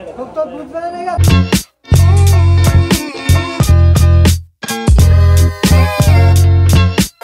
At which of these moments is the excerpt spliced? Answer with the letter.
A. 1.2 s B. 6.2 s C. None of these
A